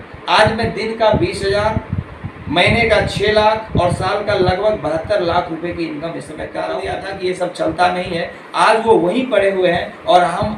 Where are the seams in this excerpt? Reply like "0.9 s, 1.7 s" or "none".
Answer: 6.9 s